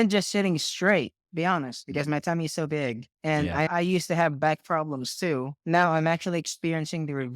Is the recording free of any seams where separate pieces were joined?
no; 2 cuts; at 3.7 s, 5.5 s

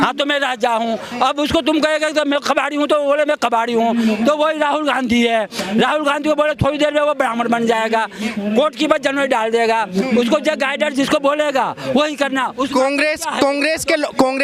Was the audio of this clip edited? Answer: no; 0 cuts

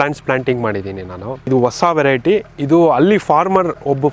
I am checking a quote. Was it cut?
yes; 1 cut; at 1.4 s

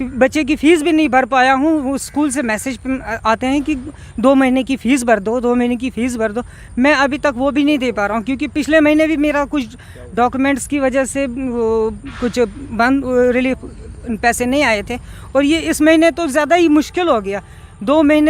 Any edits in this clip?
no; 0 cuts

